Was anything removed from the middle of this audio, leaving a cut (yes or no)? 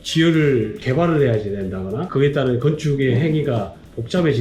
yes